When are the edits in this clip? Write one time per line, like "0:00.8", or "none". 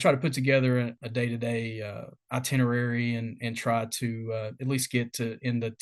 0:01.0